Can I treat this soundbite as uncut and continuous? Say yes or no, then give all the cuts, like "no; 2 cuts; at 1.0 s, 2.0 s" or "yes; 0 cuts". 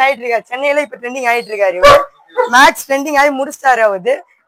yes; 0 cuts